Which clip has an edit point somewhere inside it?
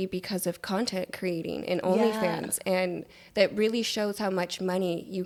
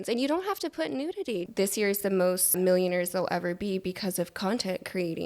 second; 2 cuts; at 1.4 s, 2.6 s

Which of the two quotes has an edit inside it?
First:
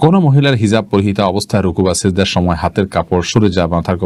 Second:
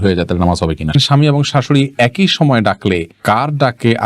second; 1 cut; at 1.0 s

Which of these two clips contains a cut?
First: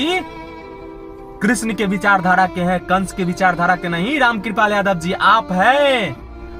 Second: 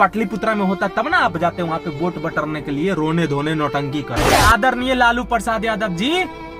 second; 1 cut; at 4.3 s

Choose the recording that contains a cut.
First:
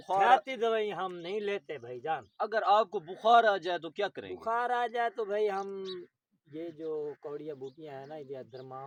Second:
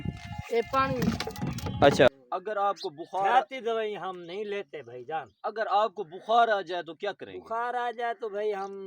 second; 1 cut; at 2.1 s

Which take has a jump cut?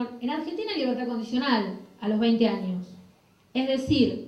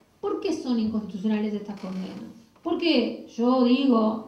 second; 1 cut; at 1.5 s

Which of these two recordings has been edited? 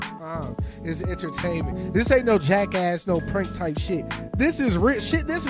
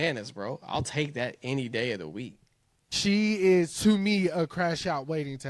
second; 1 cut; at 2.9 s

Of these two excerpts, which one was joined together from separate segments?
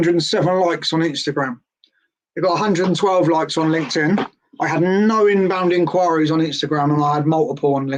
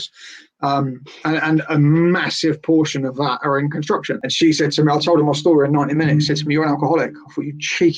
second; 1 cut; at 4.3 s

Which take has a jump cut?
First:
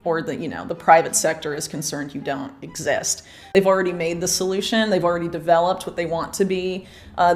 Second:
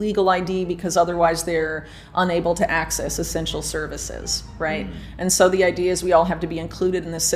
first; 1 cut; at 3.4 s

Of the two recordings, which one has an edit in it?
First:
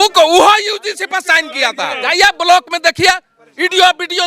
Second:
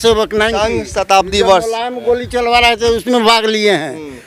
first; 1 cut; at 1.9 s

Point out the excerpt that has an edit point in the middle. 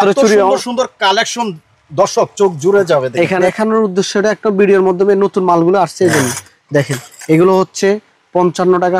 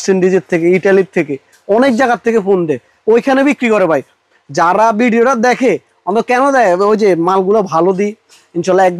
first; 1 cut; at 3.4 s

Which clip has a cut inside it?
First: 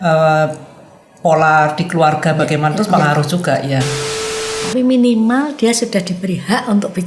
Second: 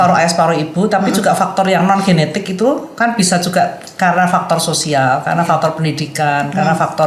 first; 1 cut; at 4.4 s

